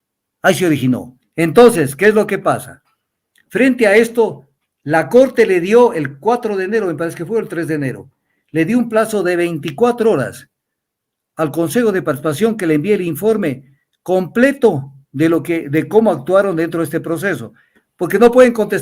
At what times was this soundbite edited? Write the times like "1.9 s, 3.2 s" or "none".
1.2 s